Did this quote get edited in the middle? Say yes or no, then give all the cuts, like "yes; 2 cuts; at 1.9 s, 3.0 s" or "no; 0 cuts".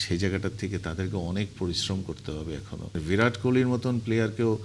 yes; 1 cut; at 3.0 s